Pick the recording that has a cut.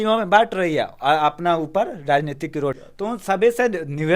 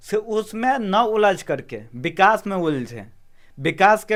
first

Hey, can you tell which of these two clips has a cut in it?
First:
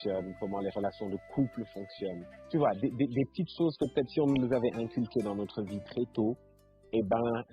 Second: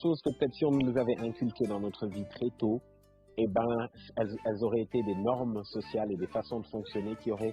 first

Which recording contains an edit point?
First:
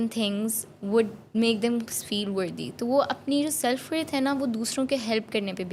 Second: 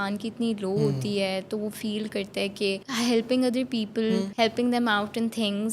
second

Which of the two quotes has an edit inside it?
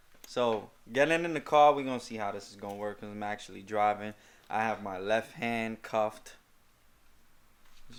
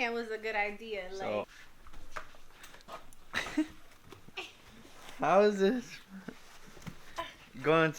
second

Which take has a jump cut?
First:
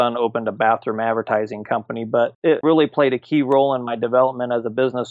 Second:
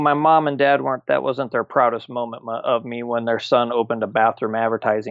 first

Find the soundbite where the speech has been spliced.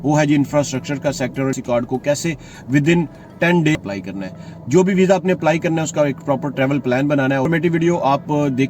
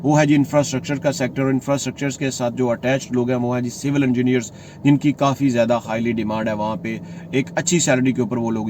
first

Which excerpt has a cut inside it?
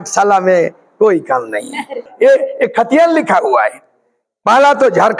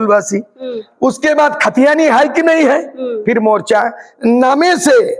first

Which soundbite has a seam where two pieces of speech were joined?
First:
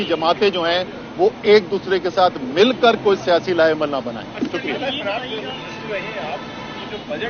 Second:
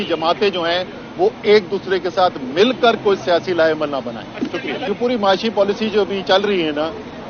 second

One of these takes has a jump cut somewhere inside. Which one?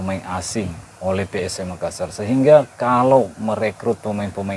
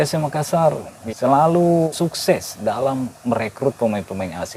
second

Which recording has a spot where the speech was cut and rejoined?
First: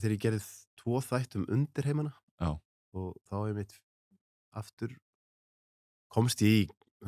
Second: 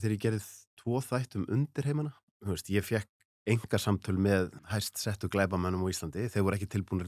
second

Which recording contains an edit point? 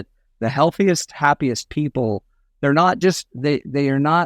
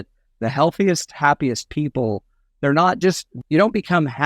second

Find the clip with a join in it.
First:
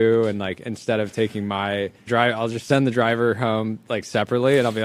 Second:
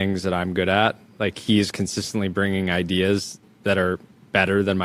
first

